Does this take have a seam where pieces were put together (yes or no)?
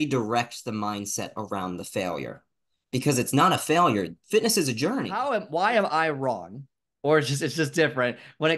yes